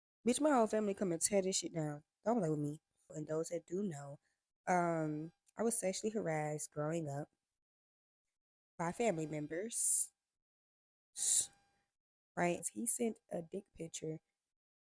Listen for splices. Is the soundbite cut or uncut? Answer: cut